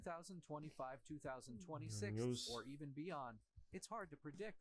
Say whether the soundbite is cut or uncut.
cut